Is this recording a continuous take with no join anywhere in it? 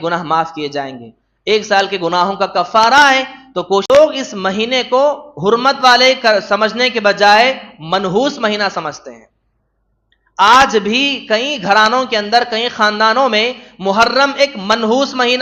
no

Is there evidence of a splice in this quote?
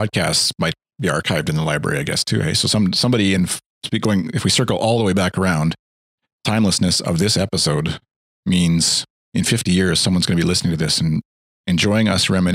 no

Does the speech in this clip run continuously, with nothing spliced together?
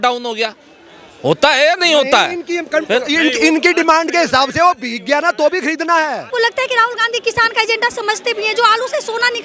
no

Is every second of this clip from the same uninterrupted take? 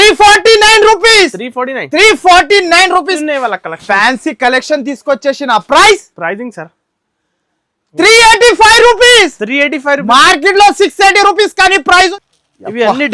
no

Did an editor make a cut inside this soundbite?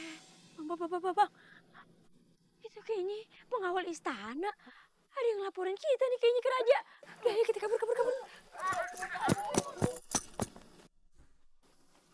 no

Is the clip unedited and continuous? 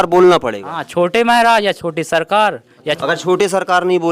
no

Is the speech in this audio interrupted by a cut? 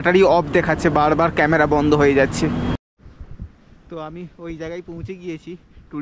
yes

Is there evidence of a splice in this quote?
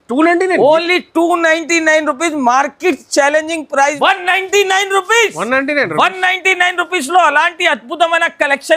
yes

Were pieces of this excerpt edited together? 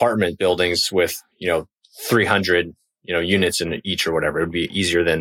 no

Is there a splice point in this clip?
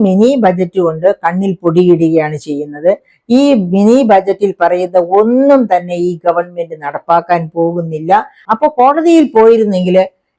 yes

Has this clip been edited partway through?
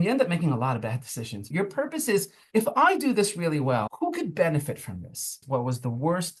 yes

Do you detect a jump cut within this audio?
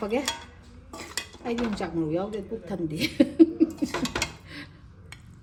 no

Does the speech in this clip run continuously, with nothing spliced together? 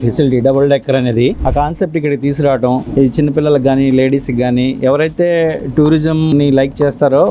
no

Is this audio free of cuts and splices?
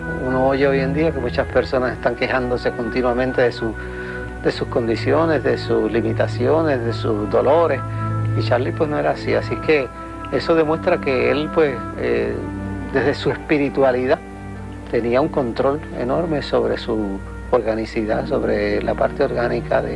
no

